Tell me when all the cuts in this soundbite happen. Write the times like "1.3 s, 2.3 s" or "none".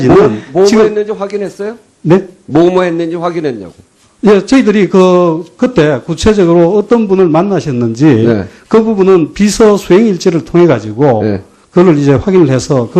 6.7 s